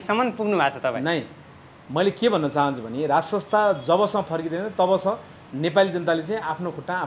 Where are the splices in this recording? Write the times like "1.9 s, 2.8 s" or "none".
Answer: none